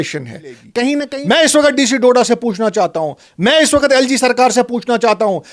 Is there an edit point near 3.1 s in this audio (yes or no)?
no